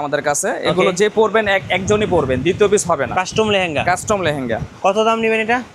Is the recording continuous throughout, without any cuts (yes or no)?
yes